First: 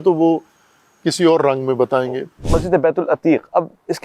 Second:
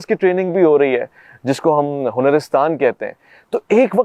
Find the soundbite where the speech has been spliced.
first; 1 cut; at 2.4 s

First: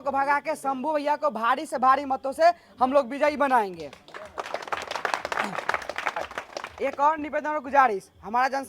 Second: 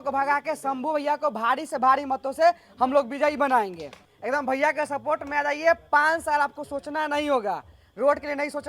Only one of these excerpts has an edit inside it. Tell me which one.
second; 1 cut; at 4.1 s

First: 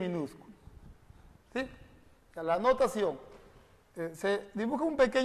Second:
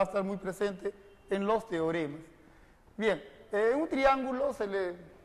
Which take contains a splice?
first; 1 cut; at 1.6 s

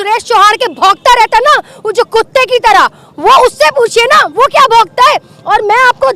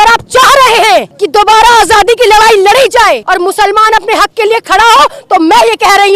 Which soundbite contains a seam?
second; 2 cuts; at 1.2 s, 3.2 s

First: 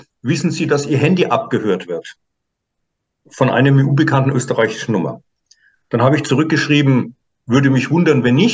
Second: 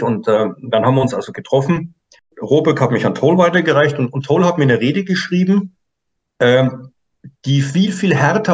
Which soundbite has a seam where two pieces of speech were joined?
second; 1 cut; at 2.3 s

